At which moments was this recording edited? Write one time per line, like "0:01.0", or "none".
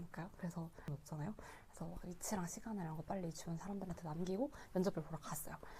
0:01.0